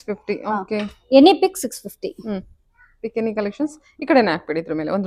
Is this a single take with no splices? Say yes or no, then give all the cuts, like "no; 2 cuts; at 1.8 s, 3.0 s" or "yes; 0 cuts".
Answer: yes; 0 cuts